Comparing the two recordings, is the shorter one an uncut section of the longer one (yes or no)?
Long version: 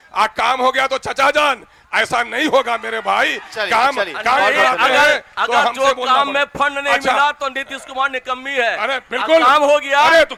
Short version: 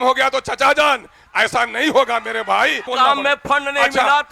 no